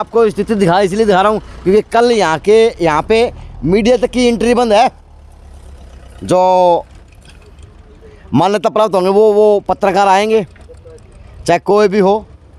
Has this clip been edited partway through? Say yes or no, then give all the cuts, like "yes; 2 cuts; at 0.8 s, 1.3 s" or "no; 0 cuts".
no; 0 cuts